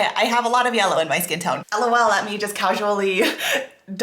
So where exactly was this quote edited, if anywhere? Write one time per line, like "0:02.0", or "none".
0:01.6